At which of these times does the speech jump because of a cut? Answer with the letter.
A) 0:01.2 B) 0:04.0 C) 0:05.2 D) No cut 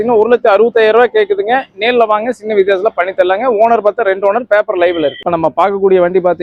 D